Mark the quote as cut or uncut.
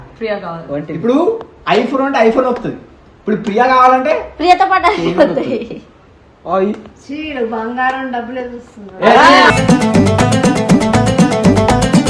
uncut